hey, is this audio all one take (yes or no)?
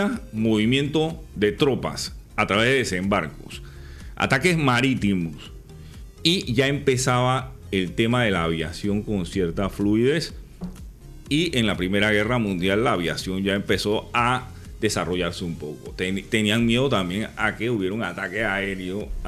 yes